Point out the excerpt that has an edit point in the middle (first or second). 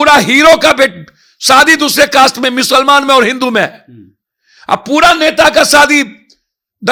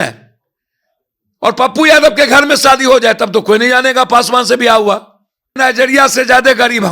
second